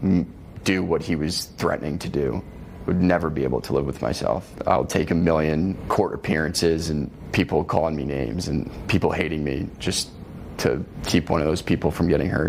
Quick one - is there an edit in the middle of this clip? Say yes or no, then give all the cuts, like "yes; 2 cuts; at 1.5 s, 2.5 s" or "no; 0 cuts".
yes; 5 cuts; at 4.5 s, 5.8 s, 7.2 s, 8.8 s, 11.0 s